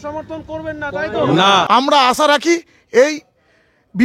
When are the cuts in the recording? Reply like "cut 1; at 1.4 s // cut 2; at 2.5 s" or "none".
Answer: cut 1; at 1.7 s